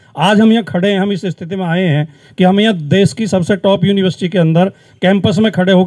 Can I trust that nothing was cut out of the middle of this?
yes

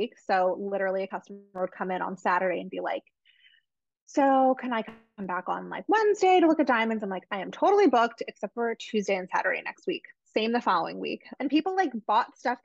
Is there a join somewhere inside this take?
yes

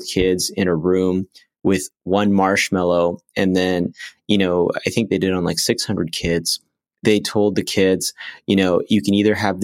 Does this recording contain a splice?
no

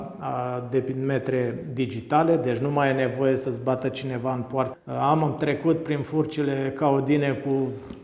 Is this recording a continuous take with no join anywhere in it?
no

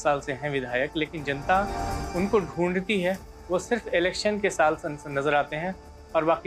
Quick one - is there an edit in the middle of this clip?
no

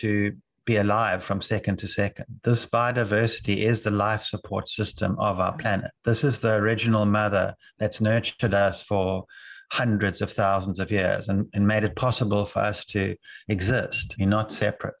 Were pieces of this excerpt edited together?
yes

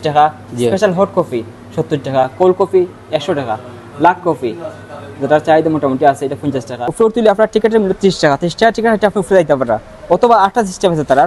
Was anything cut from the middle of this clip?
yes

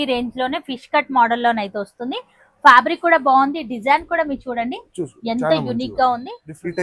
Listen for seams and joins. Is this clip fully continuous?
yes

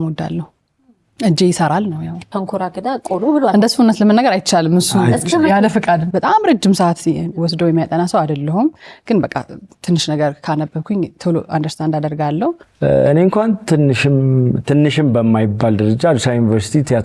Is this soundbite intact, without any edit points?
no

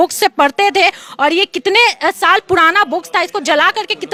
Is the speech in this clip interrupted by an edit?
no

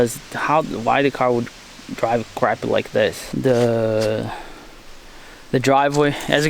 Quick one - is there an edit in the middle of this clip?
yes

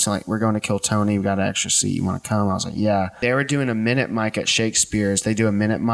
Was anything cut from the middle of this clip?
yes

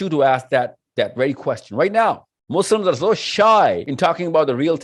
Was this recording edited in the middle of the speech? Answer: yes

